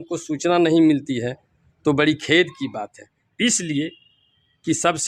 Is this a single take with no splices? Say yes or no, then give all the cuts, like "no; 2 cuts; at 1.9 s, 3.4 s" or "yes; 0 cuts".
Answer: yes; 0 cuts